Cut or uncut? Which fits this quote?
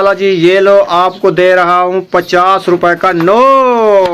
uncut